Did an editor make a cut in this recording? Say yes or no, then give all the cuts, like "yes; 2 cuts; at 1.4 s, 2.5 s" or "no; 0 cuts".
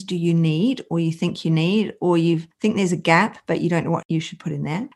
yes; 1 cut; at 4.0 s